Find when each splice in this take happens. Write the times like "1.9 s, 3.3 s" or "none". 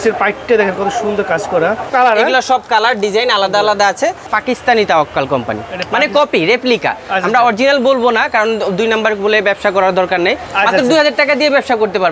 1.9 s, 4.2 s, 10.5 s